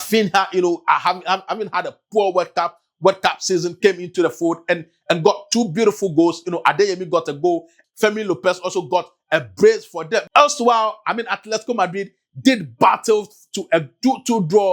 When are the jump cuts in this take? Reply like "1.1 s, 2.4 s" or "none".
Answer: 7.7 s, 10.3 s

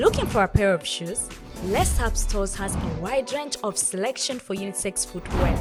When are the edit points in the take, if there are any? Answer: none

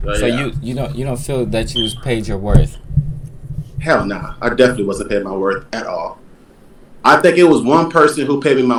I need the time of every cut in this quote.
none

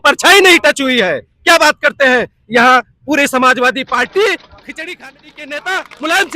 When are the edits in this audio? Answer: 5.1 s

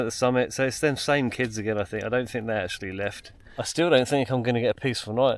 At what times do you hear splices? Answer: 3.4 s

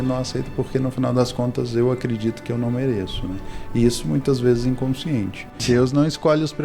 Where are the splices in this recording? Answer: 5.5 s

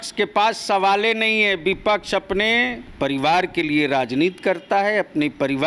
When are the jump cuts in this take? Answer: 2.8 s

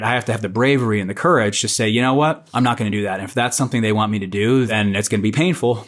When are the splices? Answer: 2.4 s, 4.7 s

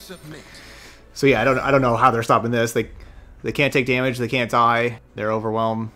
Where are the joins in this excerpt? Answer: 5.1 s

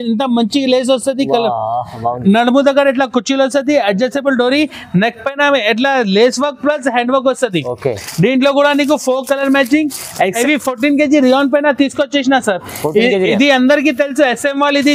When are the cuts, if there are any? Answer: 10.4 s

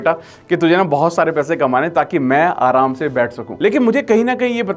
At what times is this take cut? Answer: 3.4 s

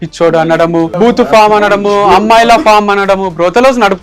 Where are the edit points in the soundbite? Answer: 0.9 s

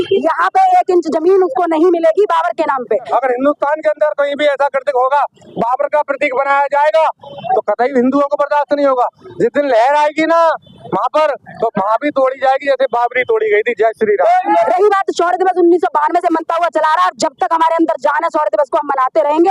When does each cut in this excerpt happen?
3.1 s, 14.5 s

